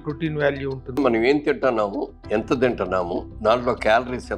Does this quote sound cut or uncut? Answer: cut